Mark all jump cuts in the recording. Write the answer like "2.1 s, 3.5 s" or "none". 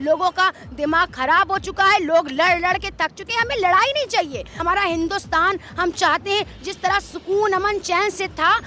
4.5 s